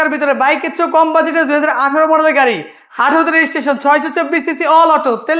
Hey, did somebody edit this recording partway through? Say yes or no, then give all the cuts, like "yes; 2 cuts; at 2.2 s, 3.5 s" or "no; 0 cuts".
no; 0 cuts